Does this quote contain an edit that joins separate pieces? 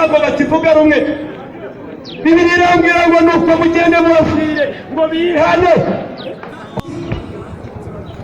yes; 1 cut; at 6.8 s

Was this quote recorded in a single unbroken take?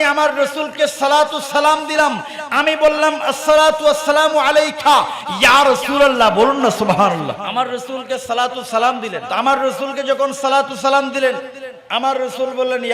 no; 2 cuts; at 7.4 s, 9.2 s

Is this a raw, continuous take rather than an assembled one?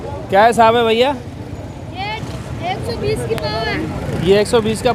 yes; 0 cuts

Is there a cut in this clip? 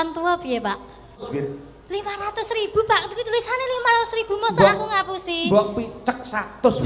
yes; 1 cut; at 1.1 s

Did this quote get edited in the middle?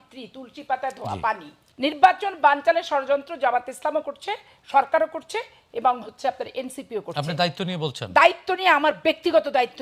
no; 0 cuts

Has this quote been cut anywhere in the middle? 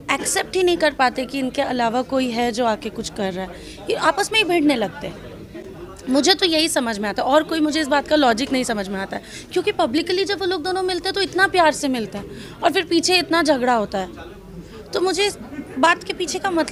no; 0 cuts

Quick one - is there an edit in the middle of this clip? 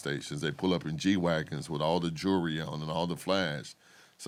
no; 0 cuts

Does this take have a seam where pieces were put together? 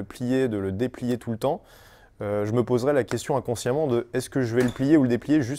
no; 0 cuts

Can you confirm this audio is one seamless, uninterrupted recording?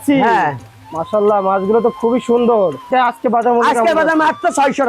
no; 1 cut; at 2.9 s

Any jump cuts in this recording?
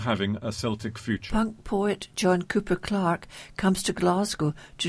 yes; 1 cut; at 1.2 s

